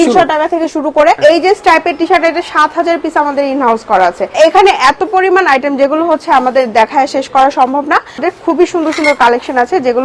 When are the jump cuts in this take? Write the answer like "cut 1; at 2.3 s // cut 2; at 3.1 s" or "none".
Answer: cut 1; at 1.2 s // cut 2; at 4.4 s // cut 3; at 8.2 s